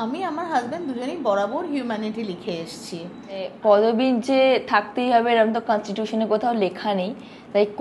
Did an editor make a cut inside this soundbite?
yes; 1 cut; at 3.5 s

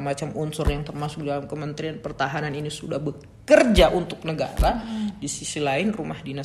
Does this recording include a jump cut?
no; 0 cuts

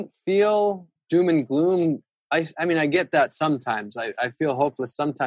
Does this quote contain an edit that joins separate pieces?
yes; 1 cut; at 0.9 s

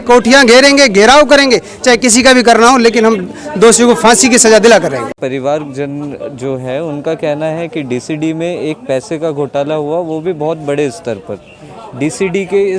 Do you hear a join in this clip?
no; 0 cuts

